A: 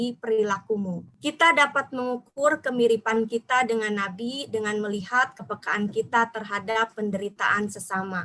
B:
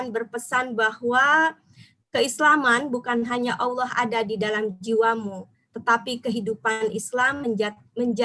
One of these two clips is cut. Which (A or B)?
A